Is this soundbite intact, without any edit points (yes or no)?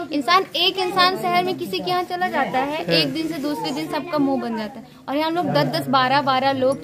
yes